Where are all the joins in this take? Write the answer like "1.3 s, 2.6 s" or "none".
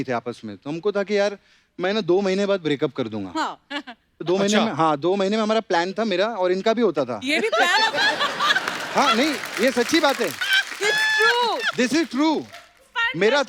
none